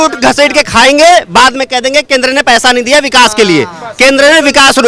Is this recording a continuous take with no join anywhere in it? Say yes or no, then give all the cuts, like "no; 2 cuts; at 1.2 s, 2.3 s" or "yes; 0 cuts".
yes; 0 cuts